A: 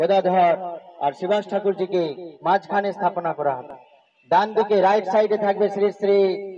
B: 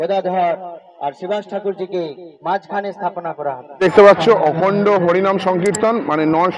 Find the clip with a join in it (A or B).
B